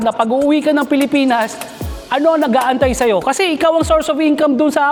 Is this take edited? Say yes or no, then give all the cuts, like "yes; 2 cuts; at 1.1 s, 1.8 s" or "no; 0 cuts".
no; 0 cuts